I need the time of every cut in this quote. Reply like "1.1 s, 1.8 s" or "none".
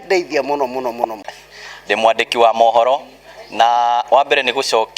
1.3 s